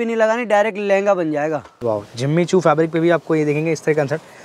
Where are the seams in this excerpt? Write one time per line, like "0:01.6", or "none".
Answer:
0:01.7